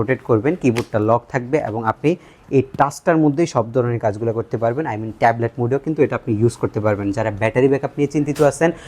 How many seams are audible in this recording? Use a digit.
0